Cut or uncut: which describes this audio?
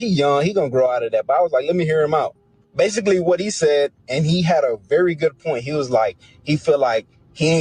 uncut